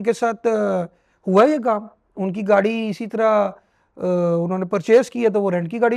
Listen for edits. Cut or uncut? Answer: uncut